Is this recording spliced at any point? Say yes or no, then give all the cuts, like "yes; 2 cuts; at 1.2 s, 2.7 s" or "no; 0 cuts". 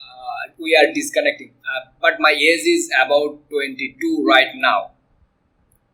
no; 0 cuts